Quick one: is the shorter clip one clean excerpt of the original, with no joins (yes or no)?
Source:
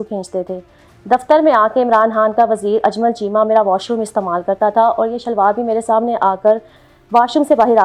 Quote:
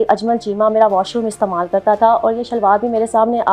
yes